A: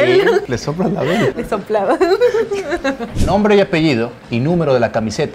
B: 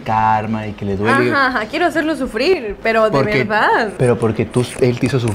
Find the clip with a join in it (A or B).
B